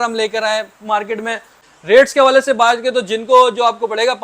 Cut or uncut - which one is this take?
cut